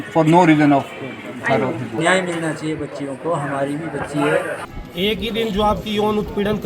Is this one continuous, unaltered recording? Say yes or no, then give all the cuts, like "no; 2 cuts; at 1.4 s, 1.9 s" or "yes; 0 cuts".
no; 2 cuts; at 2.0 s, 4.6 s